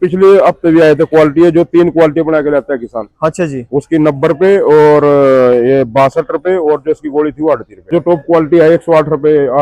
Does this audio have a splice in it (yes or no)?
yes